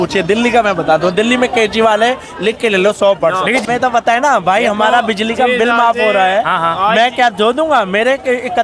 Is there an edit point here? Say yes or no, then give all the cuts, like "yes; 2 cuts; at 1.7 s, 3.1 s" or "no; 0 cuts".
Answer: yes; 1 cut; at 3.6 s